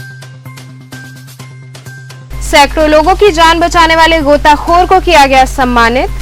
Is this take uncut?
no; 1 cut; at 1.5 s

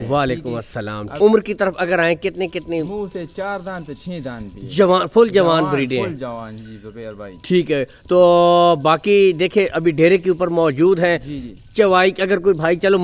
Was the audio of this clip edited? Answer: yes; 1 cut; at 1.1 s

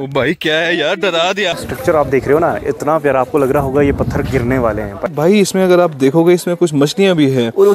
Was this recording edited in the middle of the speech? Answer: yes; 2 cuts; at 1.5 s, 5.0 s

